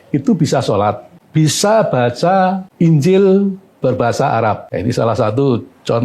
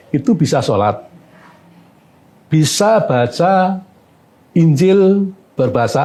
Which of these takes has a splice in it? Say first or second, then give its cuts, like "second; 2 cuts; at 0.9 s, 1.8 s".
first; 3 cuts; at 1.1 s, 2.6 s, 4.7 s